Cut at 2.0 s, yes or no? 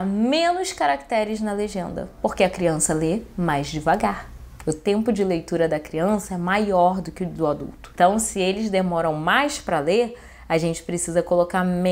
yes